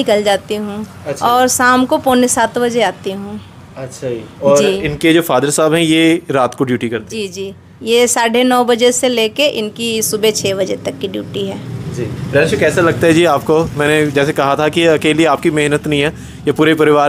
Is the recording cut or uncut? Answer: uncut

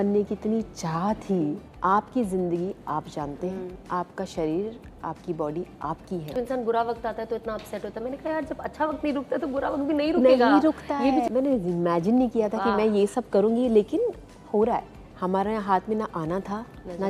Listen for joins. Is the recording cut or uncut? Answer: cut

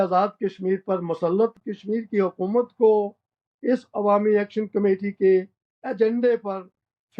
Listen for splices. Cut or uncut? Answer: cut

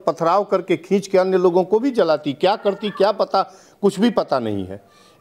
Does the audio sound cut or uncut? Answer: uncut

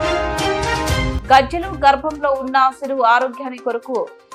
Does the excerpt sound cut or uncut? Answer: uncut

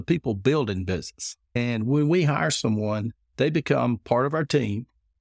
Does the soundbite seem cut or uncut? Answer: cut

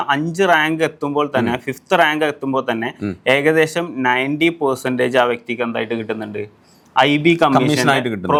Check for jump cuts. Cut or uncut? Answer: uncut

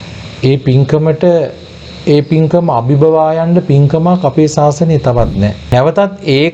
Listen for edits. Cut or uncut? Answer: cut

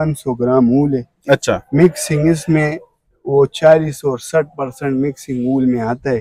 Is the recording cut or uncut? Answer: uncut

